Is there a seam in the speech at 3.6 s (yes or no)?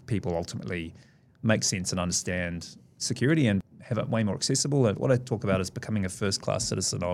yes